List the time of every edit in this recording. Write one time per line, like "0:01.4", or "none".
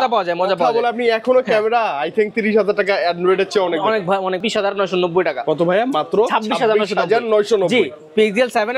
0:04.4